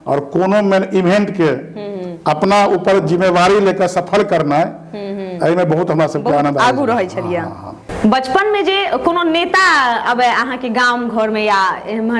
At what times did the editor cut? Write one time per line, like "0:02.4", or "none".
none